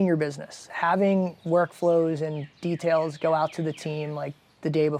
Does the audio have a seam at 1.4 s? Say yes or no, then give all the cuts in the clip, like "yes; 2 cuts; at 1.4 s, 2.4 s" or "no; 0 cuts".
no; 0 cuts